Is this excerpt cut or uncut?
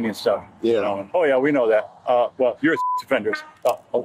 uncut